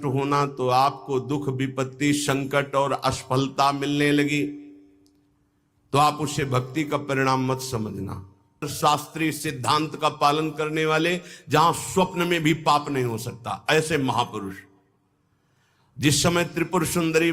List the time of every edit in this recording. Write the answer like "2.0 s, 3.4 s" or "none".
8.7 s